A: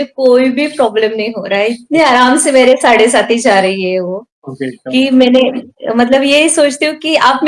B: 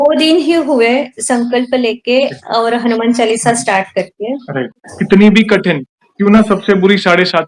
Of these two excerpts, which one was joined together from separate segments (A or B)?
B